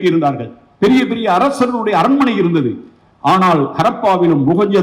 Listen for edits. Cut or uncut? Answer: uncut